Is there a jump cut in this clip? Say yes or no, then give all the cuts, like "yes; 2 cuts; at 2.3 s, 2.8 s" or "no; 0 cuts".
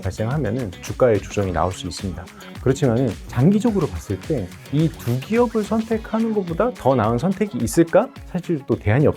no; 0 cuts